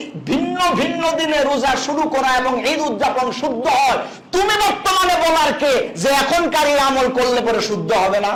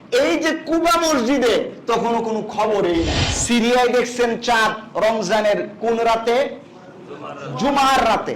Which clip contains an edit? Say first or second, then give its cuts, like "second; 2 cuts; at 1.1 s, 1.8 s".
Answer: second; 1 cut; at 3.3 s